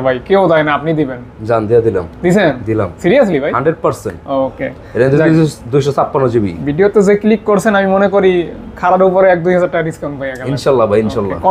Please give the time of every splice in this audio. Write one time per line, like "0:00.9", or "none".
none